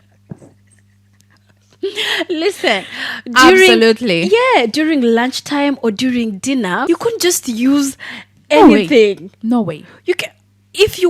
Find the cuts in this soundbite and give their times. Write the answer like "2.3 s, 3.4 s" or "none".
6.8 s